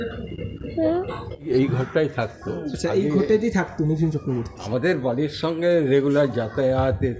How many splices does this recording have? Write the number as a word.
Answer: two